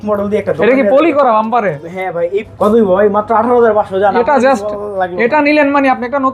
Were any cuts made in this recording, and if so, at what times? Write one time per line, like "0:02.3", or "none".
0:02.5